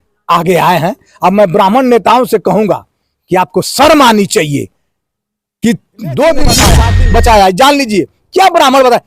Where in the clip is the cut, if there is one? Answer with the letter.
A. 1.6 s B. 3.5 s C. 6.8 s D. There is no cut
C